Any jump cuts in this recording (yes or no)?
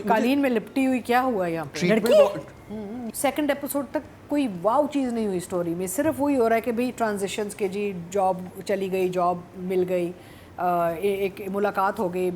yes